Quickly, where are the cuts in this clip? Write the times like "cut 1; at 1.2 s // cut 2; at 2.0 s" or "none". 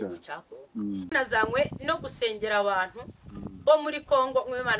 cut 1; at 1.1 s